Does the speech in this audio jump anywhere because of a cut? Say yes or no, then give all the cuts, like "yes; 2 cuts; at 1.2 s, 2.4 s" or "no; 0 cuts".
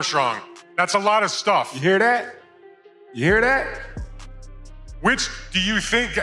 no; 0 cuts